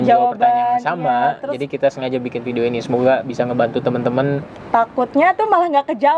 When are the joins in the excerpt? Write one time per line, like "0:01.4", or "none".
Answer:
0:04.5